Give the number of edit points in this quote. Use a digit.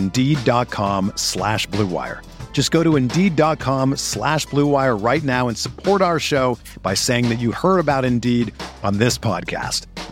0